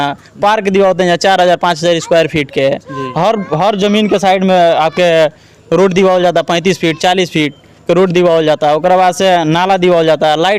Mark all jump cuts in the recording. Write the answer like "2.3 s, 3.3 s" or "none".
none

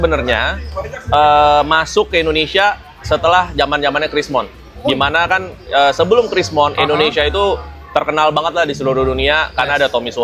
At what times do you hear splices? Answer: none

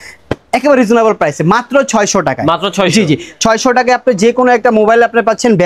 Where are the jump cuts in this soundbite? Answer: none

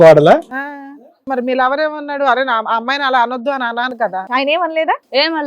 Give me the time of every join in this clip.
1.3 s, 4.1 s

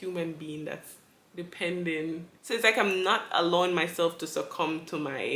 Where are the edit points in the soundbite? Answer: 2.3 s

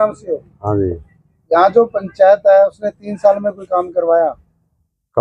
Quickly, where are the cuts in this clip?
none

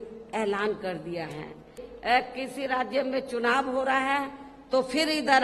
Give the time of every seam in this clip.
1.9 s

